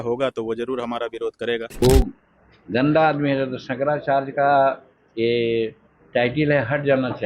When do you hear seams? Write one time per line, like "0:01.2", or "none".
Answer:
0:01.8